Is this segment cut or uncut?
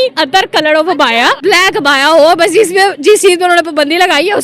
cut